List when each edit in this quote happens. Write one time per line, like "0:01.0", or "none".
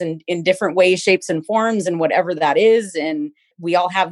none

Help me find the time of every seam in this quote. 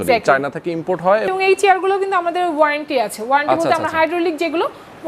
0:01.3

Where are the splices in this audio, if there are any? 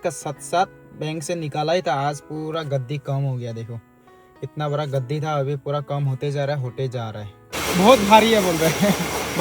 0:07.6

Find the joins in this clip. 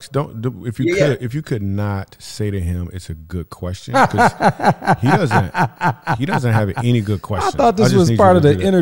none

